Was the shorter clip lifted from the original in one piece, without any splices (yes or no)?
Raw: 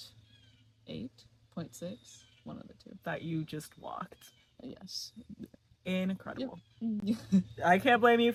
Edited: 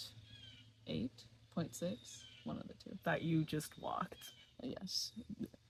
yes